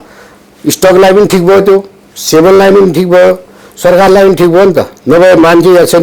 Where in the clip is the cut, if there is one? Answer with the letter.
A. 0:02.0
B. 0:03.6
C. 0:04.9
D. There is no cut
D